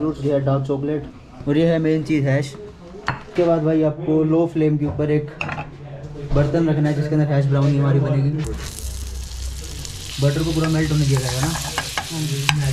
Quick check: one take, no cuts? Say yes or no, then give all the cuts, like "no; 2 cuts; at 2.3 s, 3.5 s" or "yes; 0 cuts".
yes; 0 cuts